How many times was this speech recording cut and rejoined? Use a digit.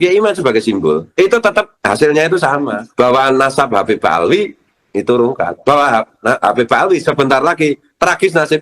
3